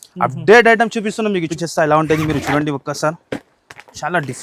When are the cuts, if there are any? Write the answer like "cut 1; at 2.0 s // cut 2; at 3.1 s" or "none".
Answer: cut 1; at 1.5 s